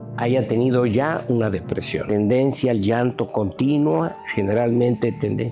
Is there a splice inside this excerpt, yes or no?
yes